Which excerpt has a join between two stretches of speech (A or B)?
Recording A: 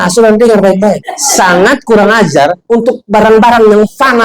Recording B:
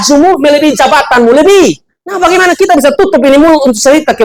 A